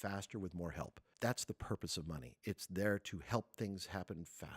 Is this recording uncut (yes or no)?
no